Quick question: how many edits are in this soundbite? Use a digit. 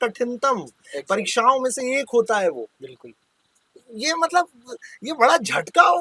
1